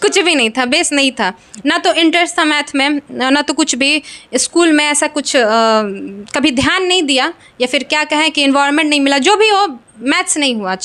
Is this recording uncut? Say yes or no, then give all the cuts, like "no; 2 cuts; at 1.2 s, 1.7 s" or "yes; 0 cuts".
yes; 0 cuts